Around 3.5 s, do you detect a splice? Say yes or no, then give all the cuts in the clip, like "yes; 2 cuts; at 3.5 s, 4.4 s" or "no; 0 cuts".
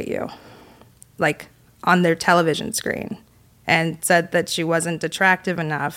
no; 0 cuts